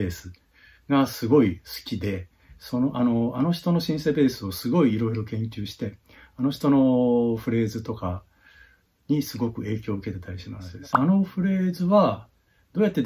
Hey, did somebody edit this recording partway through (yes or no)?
yes